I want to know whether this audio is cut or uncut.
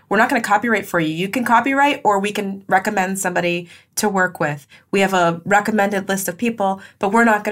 uncut